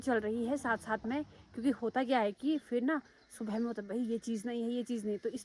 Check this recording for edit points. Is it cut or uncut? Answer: uncut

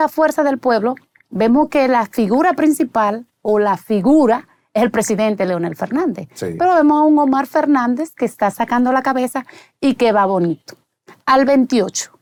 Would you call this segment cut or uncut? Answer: uncut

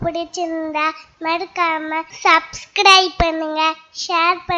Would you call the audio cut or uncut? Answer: cut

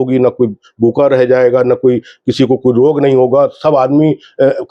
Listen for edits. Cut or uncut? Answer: uncut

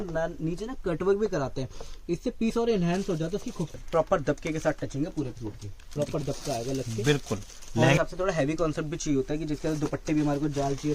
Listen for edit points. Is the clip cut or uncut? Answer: cut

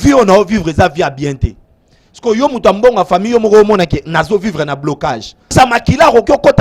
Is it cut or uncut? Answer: cut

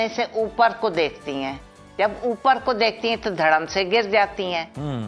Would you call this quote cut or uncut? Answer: uncut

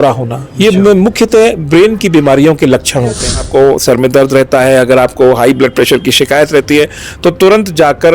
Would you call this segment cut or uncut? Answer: cut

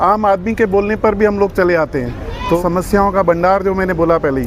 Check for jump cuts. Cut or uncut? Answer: cut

